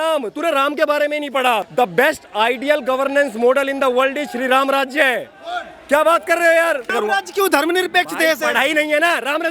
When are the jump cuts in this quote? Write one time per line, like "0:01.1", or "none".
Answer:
0:01.7
0:06.9